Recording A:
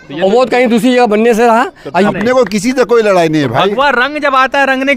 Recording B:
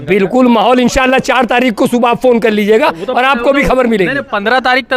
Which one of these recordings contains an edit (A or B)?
A